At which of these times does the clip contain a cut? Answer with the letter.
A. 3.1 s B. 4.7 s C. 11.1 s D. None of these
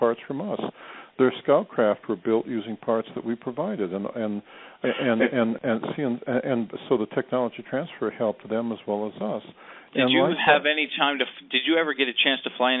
D